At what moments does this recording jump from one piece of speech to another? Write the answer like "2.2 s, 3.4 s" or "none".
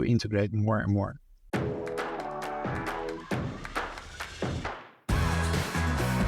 1.4 s